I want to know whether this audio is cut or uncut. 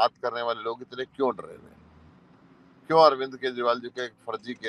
uncut